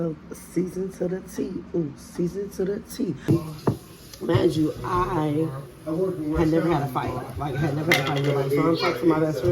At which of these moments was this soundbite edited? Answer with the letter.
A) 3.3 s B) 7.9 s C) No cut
A